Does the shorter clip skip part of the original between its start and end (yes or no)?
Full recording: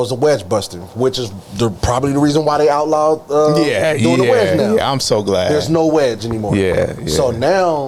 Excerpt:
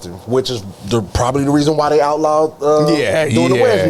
no